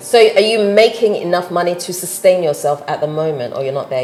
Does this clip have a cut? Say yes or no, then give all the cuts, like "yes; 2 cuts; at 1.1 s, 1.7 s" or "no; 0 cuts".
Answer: no; 0 cuts